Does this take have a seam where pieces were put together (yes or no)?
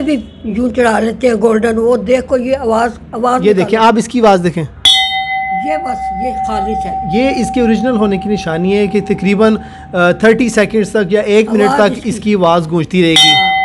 no